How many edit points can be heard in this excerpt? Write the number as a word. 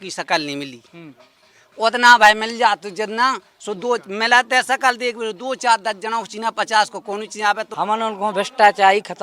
one